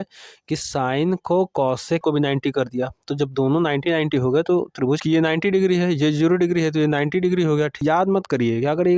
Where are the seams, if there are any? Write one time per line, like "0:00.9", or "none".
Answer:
0:02.0
0:05.0
0:07.8